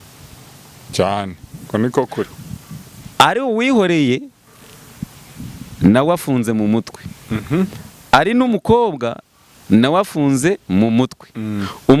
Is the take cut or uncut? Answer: uncut